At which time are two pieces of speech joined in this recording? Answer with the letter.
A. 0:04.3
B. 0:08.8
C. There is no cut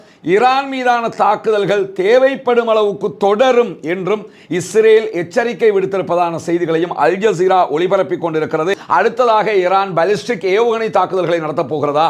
B